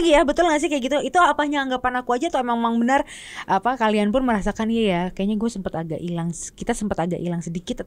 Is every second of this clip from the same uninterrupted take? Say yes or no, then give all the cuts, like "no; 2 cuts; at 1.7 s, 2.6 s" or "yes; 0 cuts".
yes; 0 cuts